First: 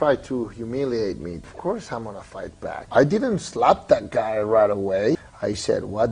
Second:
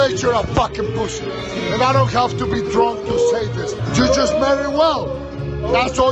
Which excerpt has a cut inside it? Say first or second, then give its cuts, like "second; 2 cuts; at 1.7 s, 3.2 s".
first; 3 cuts; at 1.5 s, 2.8 s, 5.2 s